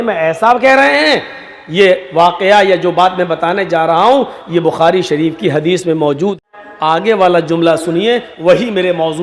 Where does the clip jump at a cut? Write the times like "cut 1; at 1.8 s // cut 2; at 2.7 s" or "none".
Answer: cut 1; at 6.4 s